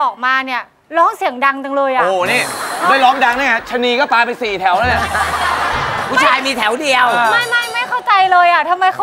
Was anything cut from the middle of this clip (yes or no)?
no